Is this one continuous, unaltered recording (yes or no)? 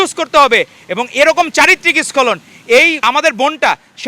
no